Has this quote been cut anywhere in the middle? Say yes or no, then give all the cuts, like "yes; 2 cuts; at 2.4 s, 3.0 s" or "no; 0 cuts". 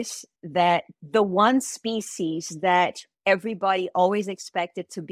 yes; 1 cut; at 1.0 s